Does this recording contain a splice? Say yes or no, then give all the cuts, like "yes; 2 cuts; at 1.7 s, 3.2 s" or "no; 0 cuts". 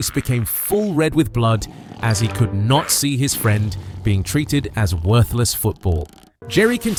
no; 0 cuts